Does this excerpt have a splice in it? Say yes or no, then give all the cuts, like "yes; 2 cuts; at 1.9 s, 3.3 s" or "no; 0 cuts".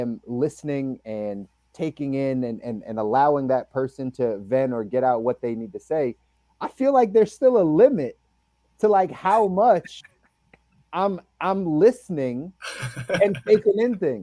no; 0 cuts